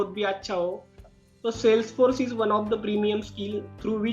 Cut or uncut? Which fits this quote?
cut